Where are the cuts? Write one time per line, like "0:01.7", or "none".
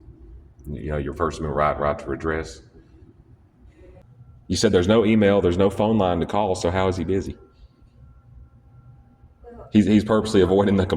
0:04.0

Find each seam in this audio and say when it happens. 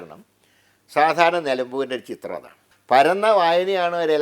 0:02.7

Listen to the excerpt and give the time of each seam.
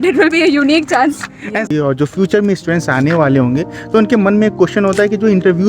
0:01.7

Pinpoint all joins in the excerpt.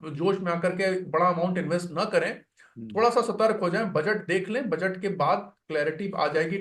none

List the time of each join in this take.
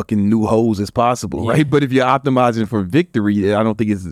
0:01.7

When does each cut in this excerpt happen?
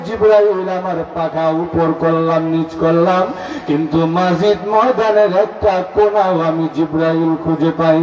none

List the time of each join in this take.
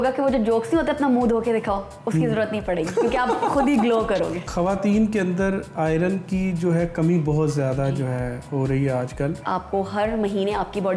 0:04.4
0:09.4

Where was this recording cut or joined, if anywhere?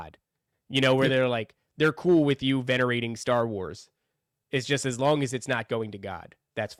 none

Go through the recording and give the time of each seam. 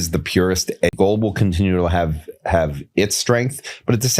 0:00.9

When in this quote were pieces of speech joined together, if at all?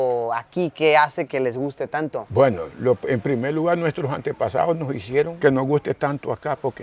none

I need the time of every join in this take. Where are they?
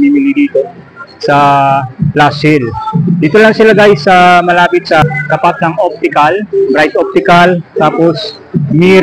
0:05.0

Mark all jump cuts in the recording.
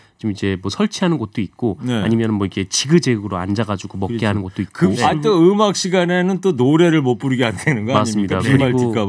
0:05.0

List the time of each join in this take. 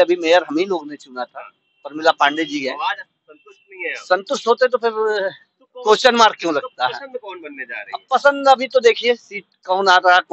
none

